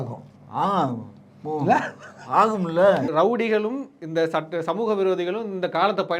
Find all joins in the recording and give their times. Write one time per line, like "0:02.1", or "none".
0:03.1

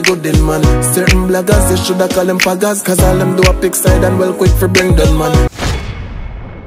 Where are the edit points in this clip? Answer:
0:05.5

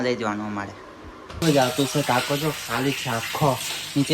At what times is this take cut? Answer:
0:01.4

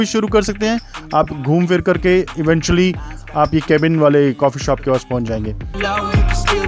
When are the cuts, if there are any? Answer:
0:05.7

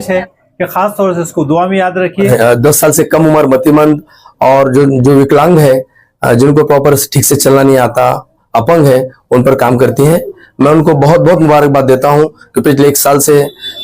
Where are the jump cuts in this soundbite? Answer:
0:02.3

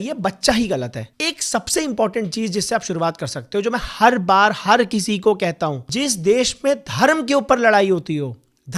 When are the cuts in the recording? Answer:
0:01.0
0:05.8

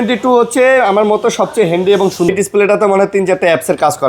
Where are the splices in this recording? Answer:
0:02.3

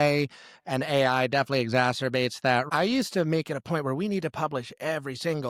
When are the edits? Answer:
none

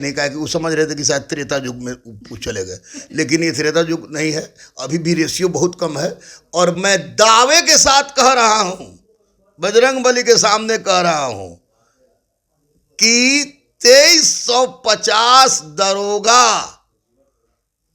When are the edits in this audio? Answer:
none

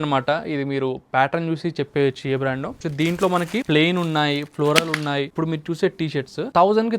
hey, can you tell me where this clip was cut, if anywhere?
0:02.8
0:03.6
0:05.3

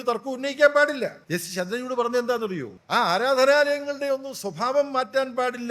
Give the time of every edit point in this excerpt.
0:01.2
0:02.7

